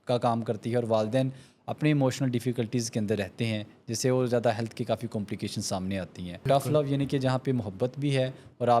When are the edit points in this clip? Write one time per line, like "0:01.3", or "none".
0:06.5